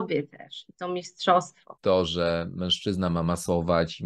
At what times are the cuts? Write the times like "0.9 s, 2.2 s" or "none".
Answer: 1.7 s